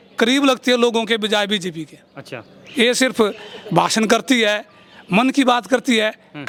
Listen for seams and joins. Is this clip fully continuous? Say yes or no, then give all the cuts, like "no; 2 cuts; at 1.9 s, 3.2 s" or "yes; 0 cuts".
yes; 0 cuts